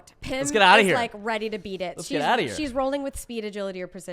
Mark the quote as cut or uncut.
uncut